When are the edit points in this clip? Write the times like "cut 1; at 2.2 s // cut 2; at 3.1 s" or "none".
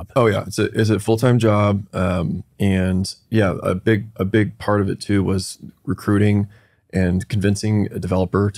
none